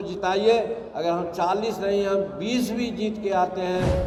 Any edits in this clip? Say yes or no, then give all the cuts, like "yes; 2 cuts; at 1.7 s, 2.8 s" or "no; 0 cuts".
no; 0 cuts